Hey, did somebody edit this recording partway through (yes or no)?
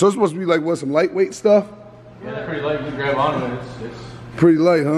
no